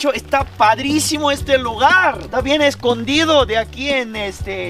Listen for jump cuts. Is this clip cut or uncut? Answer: uncut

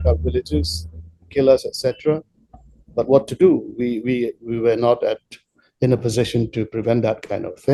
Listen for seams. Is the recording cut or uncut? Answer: uncut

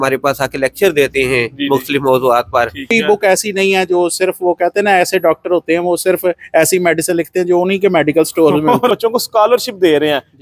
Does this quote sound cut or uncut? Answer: cut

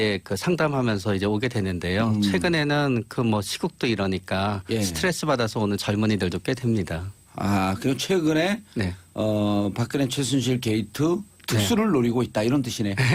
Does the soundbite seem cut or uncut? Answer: uncut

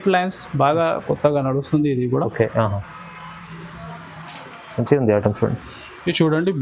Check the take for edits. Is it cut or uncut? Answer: uncut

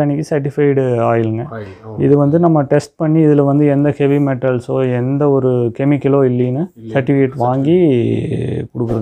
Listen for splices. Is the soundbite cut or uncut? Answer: uncut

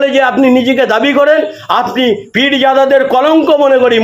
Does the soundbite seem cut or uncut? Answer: uncut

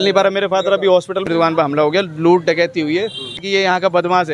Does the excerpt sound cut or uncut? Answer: cut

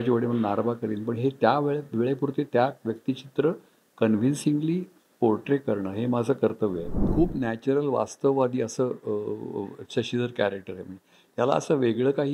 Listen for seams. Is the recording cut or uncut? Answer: cut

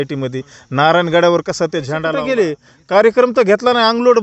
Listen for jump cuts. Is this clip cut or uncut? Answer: cut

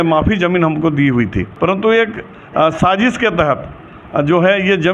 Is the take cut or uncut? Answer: cut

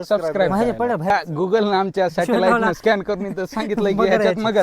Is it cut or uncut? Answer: cut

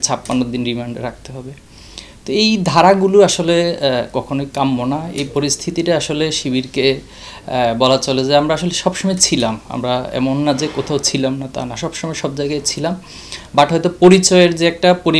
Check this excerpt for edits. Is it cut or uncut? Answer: uncut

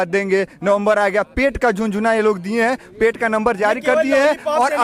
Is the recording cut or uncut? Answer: uncut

